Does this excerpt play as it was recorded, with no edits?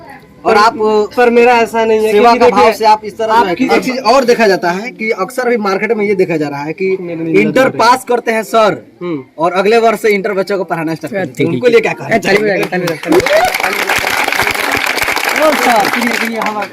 no; 1 cut; at 3.7 s

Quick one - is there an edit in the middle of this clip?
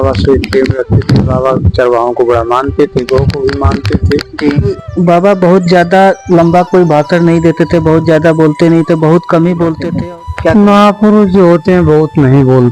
yes; 2 cuts; at 4.8 s, 9.9 s

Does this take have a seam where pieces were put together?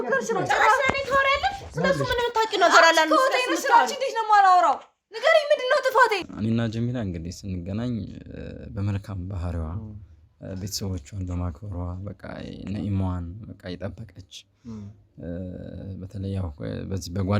yes; 1 cut; at 6.3 s

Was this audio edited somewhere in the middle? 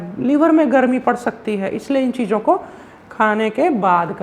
no; 0 cuts

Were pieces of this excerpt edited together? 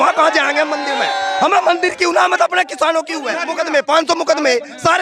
yes; 1 cut; at 3.4 s

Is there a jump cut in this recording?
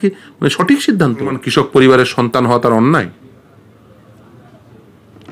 yes; 1 cut; at 1.4 s

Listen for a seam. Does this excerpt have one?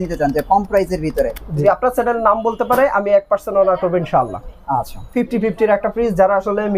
yes; 2 cuts; at 1.6 s, 5.0 s

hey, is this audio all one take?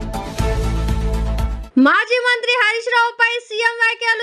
no; 1 cut; at 1.6 s

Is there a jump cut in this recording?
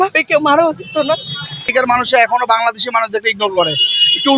yes; 1 cut; at 1.7 s

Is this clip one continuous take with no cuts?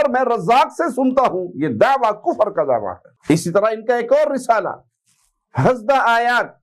yes; 0 cuts

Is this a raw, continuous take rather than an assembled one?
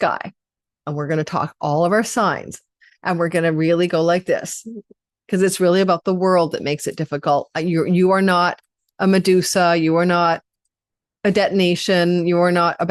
yes; 0 cuts

